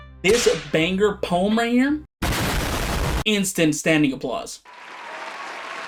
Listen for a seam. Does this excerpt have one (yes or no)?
no